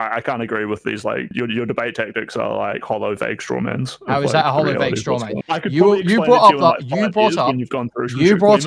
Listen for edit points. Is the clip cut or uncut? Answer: cut